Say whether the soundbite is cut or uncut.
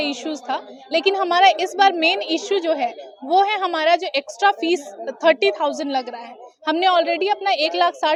uncut